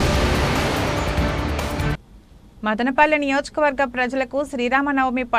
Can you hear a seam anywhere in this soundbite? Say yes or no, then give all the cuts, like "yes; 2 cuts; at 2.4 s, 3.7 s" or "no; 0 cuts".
yes; 1 cut; at 2.1 s